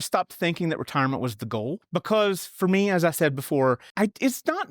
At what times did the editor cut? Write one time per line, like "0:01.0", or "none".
0:01.8
0:03.9